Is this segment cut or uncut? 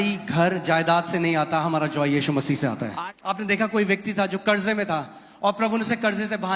cut